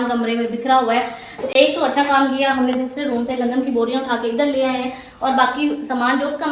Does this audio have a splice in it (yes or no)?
no